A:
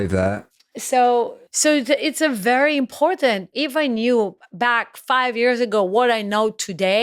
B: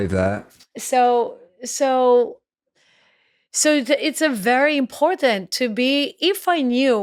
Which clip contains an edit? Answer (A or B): A